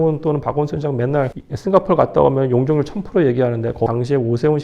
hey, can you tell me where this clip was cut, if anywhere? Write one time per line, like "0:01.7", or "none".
0:01.4
0:03.9